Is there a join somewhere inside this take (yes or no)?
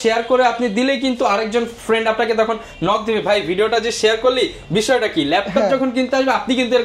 no